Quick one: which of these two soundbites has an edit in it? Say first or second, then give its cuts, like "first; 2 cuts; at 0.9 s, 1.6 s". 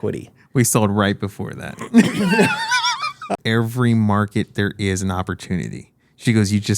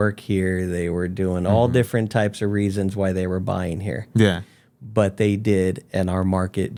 first; 1 cut; at 3.4 s